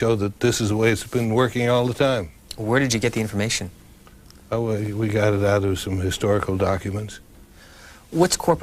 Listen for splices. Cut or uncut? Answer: cut